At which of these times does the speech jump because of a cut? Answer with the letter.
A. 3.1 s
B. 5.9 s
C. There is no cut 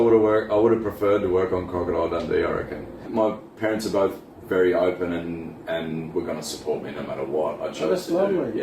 A